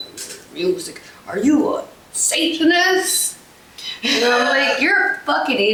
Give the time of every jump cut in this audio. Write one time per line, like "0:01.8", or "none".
none